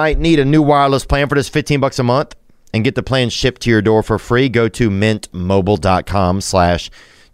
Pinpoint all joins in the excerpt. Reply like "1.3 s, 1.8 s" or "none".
none